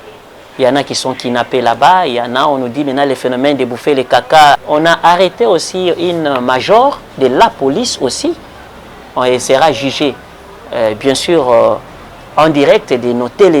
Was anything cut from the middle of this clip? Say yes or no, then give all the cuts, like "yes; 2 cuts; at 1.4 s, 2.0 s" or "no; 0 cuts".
yes; 1 cut; at 4.6 s